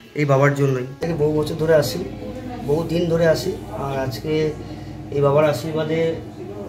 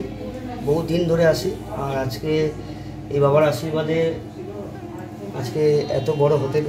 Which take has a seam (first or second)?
first